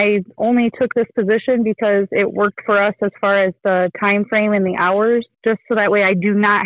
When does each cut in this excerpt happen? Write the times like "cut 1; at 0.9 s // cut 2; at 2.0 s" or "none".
none